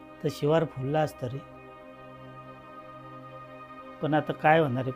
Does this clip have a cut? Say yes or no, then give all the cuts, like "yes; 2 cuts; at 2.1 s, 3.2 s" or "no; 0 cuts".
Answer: no; 0 cuts